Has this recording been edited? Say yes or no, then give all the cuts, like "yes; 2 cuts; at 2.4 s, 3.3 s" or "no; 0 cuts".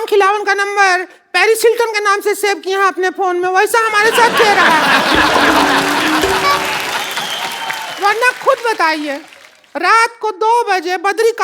no; 0 cuts